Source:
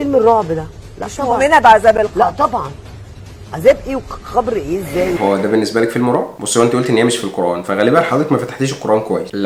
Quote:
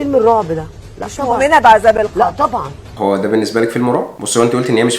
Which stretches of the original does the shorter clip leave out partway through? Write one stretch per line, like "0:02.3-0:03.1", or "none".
0:03.0-0:05.2